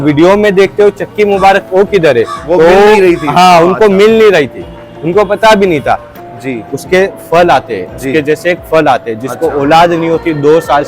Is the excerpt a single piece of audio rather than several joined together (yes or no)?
no